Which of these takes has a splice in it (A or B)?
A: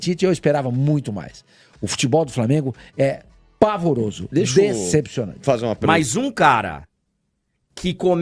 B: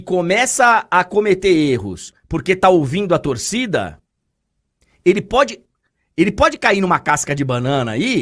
A